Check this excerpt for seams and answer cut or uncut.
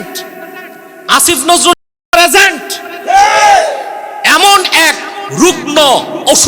uncut